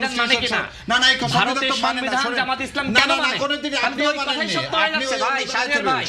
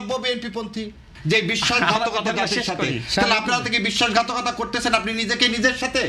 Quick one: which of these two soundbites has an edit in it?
second; 1 cut; at 1.1 s

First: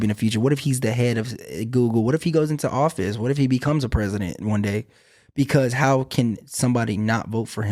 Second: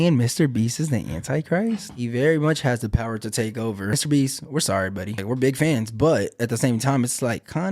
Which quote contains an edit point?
second; 3 cuts; at 1.9 s, 3.9 s, 5.2 s

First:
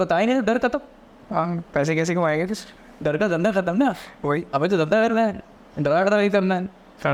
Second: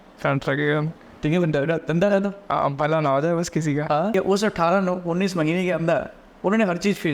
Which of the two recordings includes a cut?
second; 1 cut; at 4.1 s

